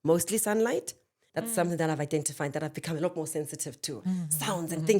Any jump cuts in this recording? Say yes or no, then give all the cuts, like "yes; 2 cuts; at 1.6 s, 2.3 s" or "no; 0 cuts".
yes; 1 cut; at 1.2 s